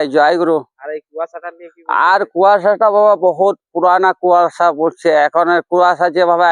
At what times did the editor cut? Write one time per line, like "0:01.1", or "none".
none